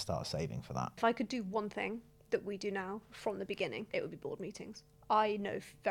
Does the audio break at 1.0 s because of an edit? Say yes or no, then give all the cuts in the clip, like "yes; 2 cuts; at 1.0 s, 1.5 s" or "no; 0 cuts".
yes; 3 cuts; at 1.0 s, 3.9 s, 4.9 s